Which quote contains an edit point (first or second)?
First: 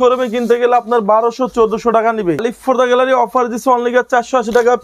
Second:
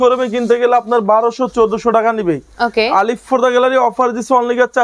first